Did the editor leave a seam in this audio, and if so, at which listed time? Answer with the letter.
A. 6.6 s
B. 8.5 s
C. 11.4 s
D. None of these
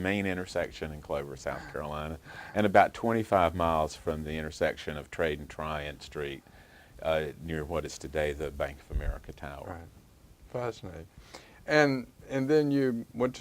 B